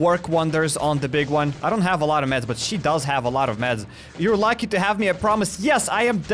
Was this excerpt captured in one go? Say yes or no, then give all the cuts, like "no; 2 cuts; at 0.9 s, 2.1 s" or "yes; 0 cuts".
no; 1 cut; at 1.6 s